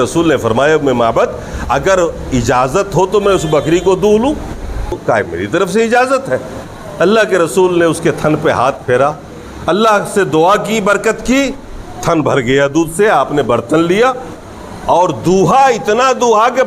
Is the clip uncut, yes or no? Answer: no